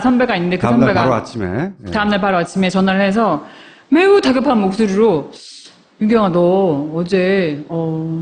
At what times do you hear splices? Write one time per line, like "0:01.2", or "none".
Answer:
none